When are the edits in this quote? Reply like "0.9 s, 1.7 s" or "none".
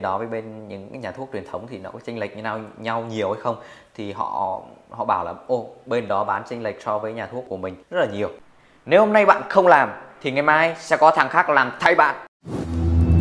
8.4 s